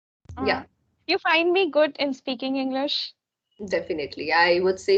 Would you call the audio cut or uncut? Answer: uncut